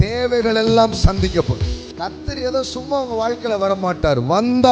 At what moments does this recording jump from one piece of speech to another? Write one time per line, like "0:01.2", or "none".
0:01.8